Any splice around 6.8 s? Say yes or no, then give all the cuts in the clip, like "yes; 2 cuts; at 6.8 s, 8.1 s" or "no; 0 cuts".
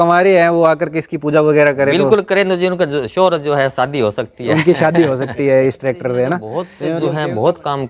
yes; 1 cut; at 6.8 s